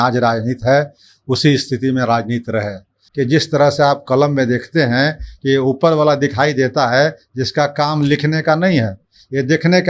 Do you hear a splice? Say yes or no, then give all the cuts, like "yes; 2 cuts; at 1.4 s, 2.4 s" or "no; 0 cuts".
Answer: yes; 1 cut; at 3.0 s